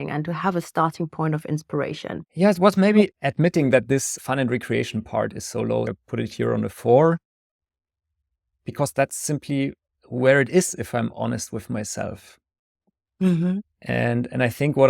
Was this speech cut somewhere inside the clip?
yes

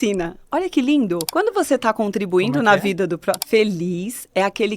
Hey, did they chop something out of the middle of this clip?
yes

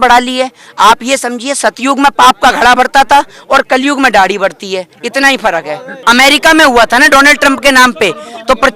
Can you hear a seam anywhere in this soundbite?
yes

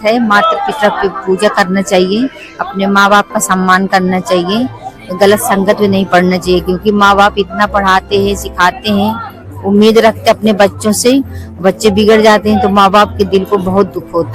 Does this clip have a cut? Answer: no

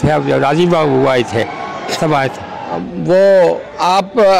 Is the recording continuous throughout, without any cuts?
no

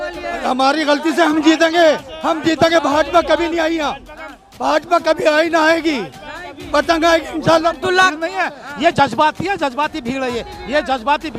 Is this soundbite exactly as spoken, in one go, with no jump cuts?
no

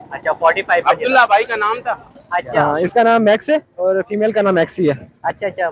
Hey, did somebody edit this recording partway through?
yes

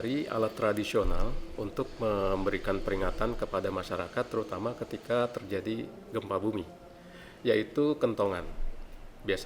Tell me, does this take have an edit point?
no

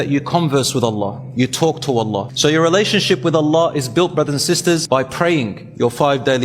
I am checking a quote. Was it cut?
yes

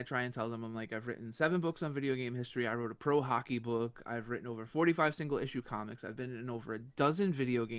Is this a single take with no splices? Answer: yes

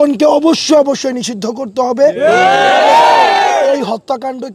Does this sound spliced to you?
no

